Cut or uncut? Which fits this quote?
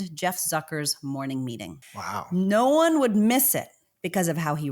cut